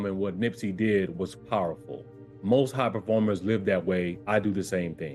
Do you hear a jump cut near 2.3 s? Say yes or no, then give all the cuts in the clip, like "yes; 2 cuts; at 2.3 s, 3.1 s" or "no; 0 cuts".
no; 0 cuts